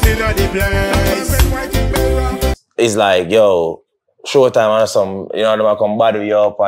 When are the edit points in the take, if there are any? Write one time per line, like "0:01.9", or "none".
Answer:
0:02.6